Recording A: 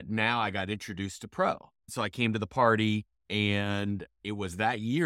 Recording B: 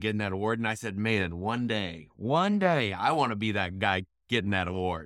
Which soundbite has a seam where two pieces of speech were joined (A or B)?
A